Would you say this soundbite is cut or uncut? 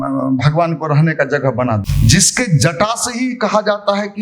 cut